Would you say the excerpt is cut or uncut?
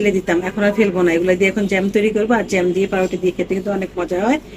uncut